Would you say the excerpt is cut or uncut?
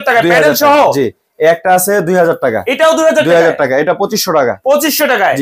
uncut